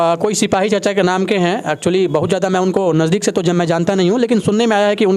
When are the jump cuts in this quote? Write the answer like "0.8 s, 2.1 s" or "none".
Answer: none

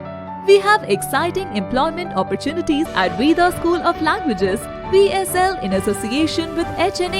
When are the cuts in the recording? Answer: 2.9 s

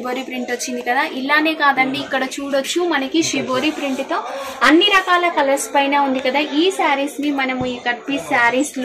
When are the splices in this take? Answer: none

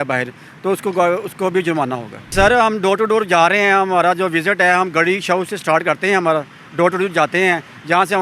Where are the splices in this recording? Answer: 2.3 s

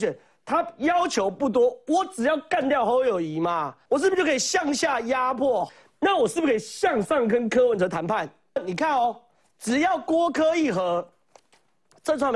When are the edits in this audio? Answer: 3.7 s, 5.7 s, 8.6 s

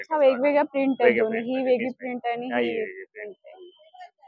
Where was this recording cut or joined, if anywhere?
none

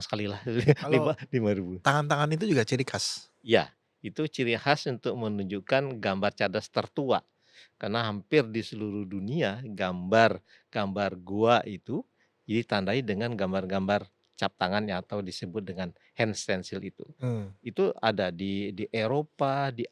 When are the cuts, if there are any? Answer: 1.7 s

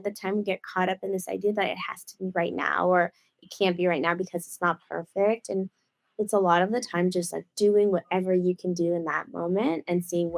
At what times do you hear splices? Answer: none

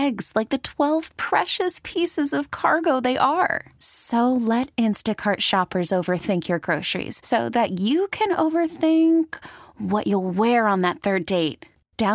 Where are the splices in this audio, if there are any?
none

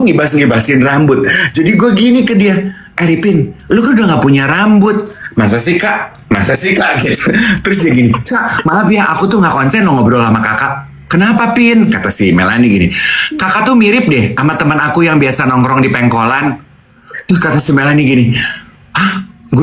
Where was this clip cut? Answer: none

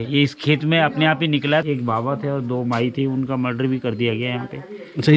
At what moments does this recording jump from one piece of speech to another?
1.6 s

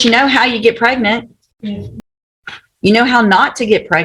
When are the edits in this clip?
1.9 s

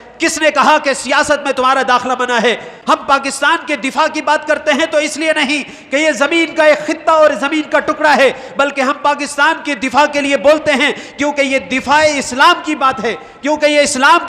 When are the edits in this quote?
2.7 s

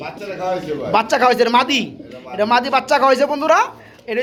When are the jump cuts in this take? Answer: none

